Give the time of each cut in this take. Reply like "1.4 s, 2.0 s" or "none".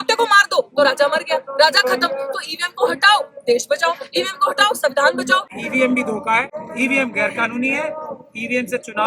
5.5 s, 6.6 s